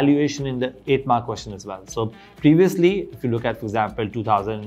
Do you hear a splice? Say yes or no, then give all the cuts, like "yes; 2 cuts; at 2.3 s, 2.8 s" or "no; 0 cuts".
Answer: no; 0 cuts